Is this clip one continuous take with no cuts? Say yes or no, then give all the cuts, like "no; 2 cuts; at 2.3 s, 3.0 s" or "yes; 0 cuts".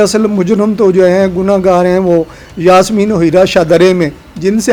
yes; 0 cuts